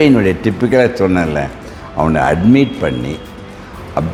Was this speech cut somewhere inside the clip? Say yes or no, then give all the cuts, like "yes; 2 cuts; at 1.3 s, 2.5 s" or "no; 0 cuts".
no; 0 cuts